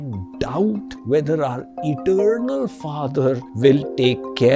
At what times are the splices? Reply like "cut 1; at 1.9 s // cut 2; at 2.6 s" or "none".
cut 1; at 0.9 s // cut 2; at 3.5 s